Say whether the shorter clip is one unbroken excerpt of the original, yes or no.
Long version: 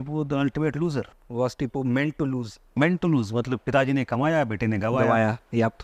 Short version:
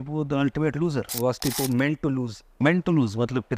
no